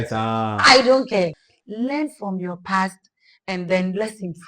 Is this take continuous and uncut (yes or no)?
no